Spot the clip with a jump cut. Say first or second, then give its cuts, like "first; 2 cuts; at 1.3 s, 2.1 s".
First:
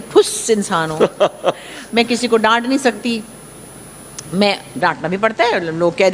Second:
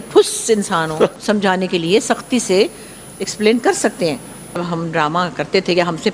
second; 2 cuts; at 1.2 s, 4.6 s